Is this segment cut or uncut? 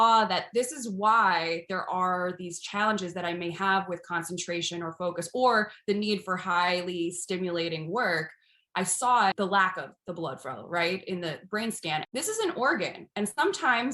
cut